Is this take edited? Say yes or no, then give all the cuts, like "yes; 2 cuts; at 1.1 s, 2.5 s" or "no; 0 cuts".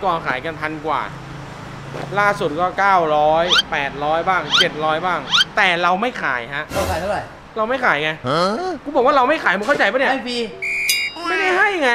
yes; 2 cuts; at 7.4 s, 8.8 s